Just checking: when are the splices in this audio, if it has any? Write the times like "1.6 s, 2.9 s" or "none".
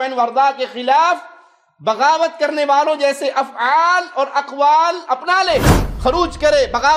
5.8 s

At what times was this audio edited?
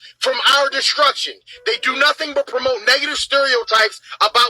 1.9 s

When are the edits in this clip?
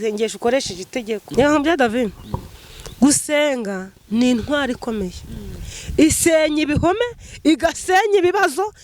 1.3 s

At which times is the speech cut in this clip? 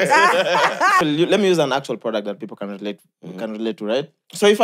1.0 s

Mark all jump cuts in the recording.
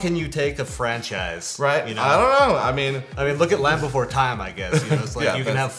none

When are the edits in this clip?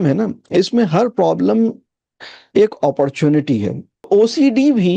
4.1 s

